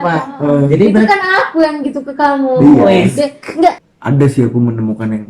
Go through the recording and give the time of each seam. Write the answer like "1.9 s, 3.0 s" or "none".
3.8 s